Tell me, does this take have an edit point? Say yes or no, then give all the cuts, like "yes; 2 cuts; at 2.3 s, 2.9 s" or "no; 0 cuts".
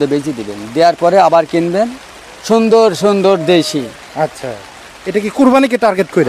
no; 0 cuts